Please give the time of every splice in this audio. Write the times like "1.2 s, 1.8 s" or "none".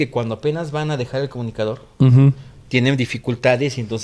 none